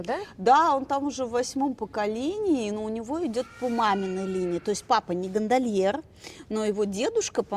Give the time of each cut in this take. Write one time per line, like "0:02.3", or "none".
none